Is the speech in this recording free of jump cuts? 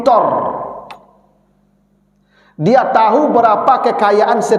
yes; 0 cuts

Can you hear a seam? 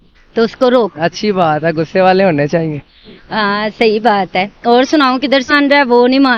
yes; 2 cuts; at 0.9 s, 5.5 s

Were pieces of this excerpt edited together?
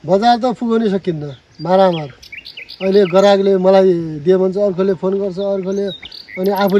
no; 0 cuts

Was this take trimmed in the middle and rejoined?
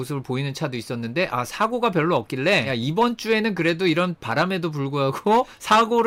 no; 0 cuts

